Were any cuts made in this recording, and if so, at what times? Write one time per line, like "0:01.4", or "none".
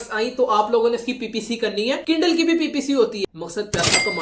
0:03.2